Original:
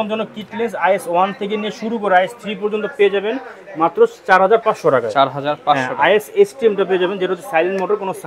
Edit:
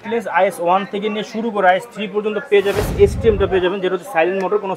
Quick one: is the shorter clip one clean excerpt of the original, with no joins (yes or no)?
no